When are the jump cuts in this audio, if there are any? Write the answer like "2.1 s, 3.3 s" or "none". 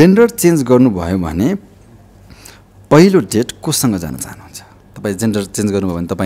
none